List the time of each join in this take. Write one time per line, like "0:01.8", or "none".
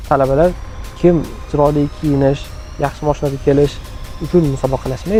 none